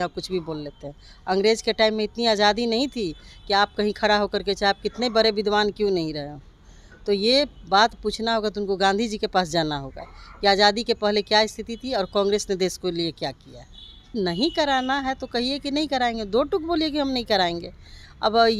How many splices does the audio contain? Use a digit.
1